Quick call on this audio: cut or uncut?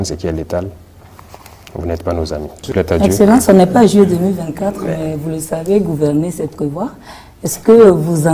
uncut